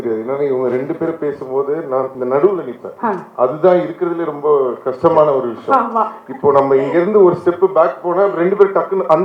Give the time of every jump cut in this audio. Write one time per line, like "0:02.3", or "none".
0:02.1